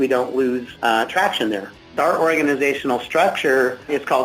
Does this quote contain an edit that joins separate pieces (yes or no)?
yes